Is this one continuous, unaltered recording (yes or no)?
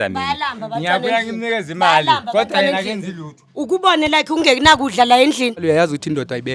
no